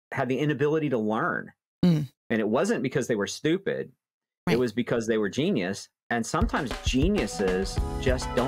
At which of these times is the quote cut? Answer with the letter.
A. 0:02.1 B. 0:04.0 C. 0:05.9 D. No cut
A